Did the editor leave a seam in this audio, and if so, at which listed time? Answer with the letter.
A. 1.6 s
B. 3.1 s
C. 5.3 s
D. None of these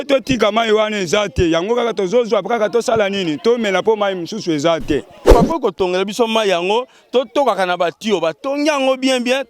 C